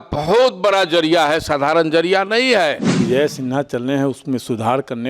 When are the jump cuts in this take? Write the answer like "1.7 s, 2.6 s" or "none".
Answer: 3.0 s